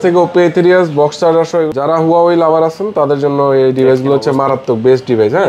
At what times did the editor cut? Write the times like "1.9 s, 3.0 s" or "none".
1.7 s